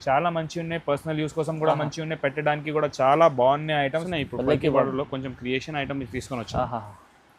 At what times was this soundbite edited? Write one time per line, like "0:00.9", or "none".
0:04.1